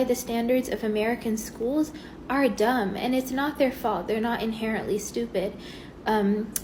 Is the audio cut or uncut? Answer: uncut